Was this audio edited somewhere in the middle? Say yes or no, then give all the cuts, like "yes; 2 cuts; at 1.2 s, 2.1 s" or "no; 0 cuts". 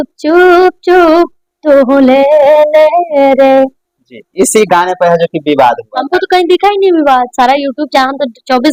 no; 0 cuts